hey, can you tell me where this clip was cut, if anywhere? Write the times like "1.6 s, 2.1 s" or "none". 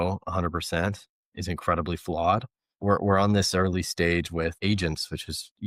1.3 s, 2.7 s, 4.6 s